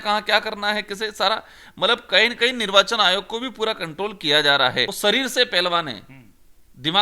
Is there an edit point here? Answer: yes; 1 cut; at 4.9 s

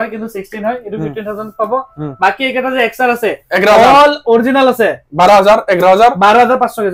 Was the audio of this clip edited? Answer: no; 0 cuts

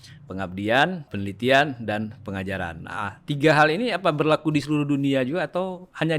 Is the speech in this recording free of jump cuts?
no; 1 cut; at 1.1 s

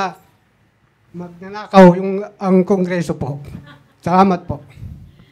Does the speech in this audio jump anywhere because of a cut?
no; 0 cuts

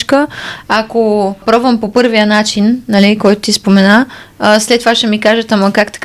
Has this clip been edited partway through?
yes; 1 cut; at 1.4 s

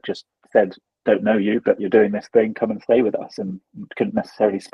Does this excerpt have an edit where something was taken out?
no; 0 cuts

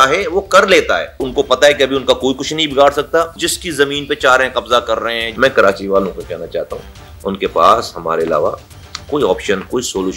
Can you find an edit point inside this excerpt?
yes; 3 cuts; at 1.3 s, 3.5 s, 5.3 s

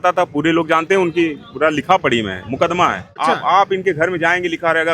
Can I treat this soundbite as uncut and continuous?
no; 1 cut; at 3.1 s

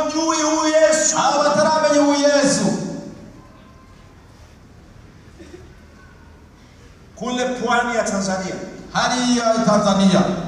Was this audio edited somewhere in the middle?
no; 0 cuts

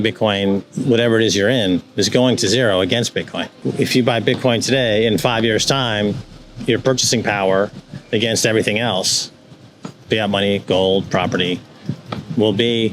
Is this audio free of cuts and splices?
no; 1 cut; at 3.6 s

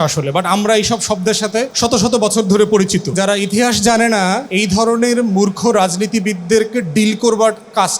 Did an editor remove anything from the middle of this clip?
yes; 3 cuts; at 1.7 s, 3.1 s, 4.5 s

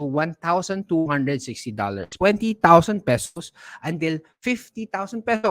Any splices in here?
yes; 1 cut; at 2.1 s

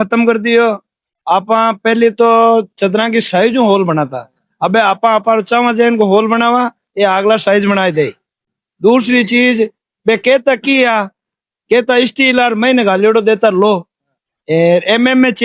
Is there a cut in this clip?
no; 0 cuts

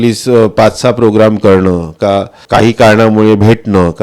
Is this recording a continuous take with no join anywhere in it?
no; 1 cut; at 2.4 s

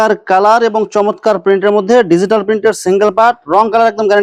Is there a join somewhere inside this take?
no; 0 cuts

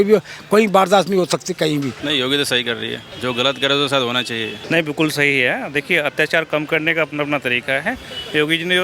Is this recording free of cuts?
no; 3 cuts; at 2.0 s, 3.1 s, 4.6 s

